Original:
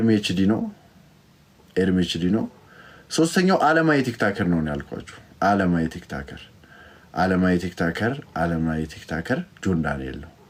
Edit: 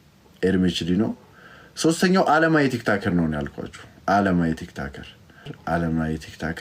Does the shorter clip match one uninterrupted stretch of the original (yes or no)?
no